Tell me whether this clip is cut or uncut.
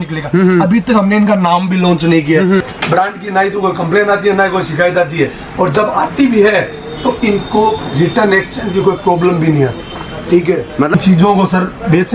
cut